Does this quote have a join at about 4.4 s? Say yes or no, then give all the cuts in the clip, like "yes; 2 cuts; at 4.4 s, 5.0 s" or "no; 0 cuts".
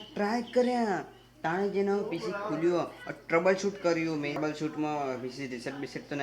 yes; 1 cut; at 4.4 s